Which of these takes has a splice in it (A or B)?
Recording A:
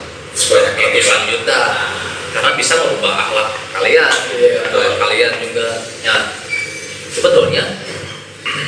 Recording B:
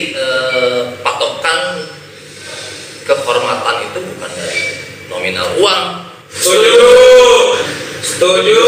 B